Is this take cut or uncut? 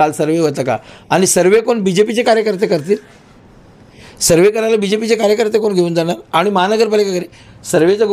uncut